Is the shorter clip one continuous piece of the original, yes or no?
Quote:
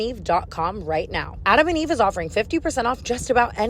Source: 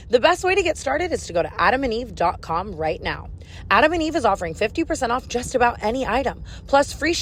no